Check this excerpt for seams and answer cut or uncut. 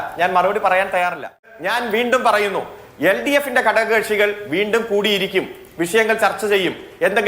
cut